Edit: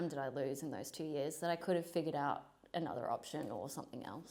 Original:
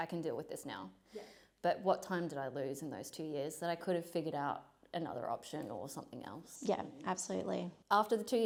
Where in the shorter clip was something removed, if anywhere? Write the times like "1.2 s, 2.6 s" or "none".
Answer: none